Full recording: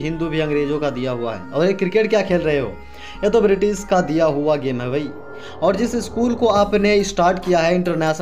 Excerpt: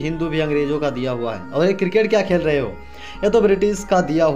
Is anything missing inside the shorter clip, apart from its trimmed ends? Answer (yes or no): no